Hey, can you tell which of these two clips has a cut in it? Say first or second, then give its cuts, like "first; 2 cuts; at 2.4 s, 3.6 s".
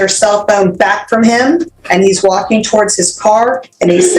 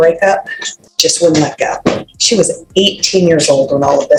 first; 1 cut; at 1.8 s